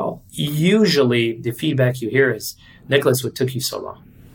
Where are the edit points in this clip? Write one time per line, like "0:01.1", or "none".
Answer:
0:01.5